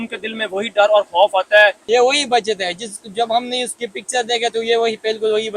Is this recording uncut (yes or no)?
no